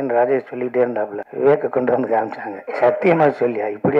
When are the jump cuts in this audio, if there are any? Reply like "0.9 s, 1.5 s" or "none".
1.2 s